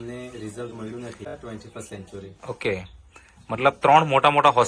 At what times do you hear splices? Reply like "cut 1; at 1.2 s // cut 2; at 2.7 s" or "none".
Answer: cut 1; at 1.4 s